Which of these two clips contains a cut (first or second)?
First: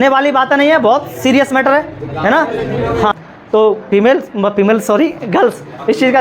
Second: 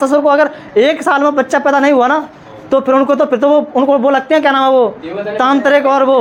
first